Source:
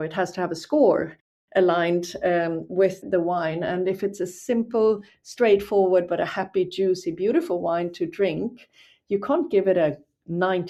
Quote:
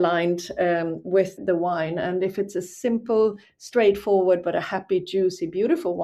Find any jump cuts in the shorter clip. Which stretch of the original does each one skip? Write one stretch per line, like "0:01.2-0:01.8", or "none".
none

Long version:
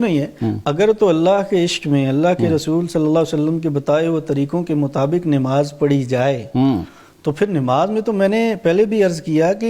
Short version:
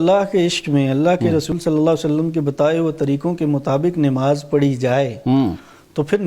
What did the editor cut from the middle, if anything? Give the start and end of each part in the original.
0:02.7-0:02.8

